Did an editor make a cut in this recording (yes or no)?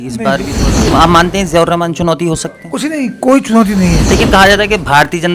yes